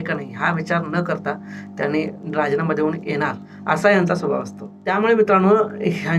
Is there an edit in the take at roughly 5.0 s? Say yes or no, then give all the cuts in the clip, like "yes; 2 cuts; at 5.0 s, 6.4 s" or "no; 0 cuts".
yes; 2 cuts; at 3.4 s, 5.0 s